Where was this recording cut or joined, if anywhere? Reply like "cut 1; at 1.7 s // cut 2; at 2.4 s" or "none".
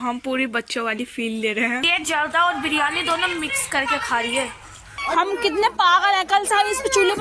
cut 1; at 1.9 s // cut 2; at 5.0 s